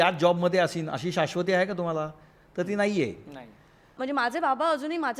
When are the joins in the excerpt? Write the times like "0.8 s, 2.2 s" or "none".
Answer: 3.9 s